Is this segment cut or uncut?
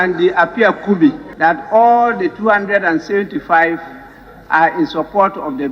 cut